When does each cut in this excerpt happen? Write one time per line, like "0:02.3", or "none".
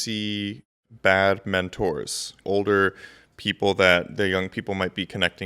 0:00.8
0:02.3